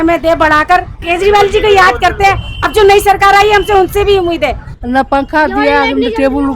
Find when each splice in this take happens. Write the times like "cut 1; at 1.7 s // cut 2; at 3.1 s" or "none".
cut 1; at 1.0 s // cut 2; at 4.6 s

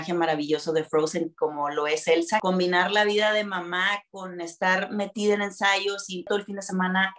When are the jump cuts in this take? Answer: cut 1; at 2.4 s // cut 2; at 6.3 s

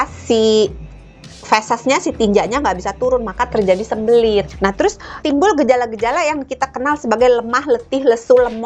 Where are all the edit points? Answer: cut 1; at 4.5 s

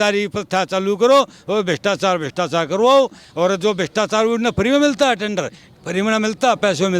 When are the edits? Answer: none

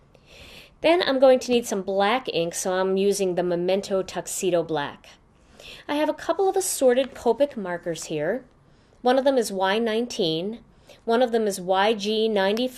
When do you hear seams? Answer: none

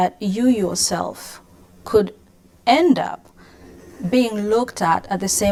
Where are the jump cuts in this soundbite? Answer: none

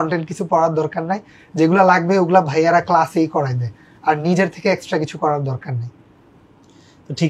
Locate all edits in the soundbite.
none

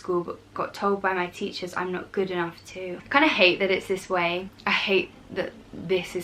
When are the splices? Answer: cut 1; at 3.0 s // cut 2; at 4.5 s

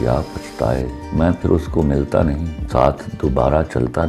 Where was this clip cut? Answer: cut 1; at 1.0 s // cut 2; at 2.5 s

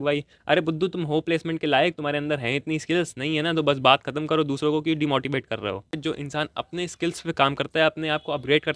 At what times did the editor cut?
cut 1; at 6.0 s

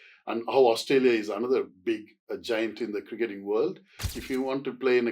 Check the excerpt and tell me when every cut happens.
cut 1; at 4.1 s

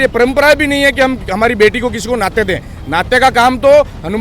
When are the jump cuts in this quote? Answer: none

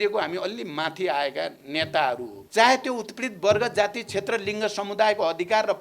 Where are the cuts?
cut 1; at 2.3 s

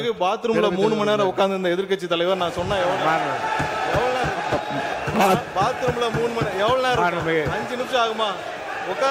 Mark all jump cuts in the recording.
none

